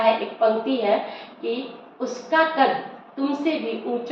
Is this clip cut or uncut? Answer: uncut